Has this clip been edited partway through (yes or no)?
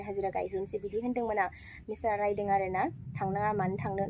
no